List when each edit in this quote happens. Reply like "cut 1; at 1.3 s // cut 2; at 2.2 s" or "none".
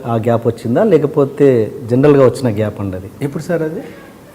none